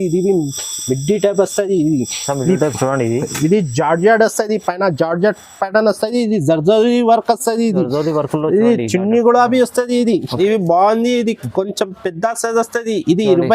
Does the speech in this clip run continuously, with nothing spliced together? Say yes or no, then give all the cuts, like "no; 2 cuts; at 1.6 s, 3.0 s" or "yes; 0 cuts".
no; 1 cut; at 10.3 s